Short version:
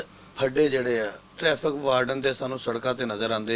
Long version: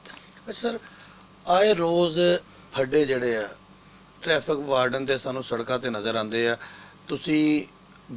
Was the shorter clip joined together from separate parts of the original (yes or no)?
yes